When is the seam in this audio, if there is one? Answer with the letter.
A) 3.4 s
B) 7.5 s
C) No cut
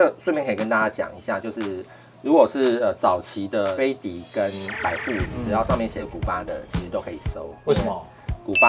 C